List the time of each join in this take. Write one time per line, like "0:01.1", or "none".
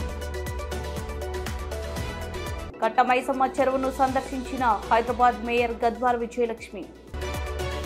none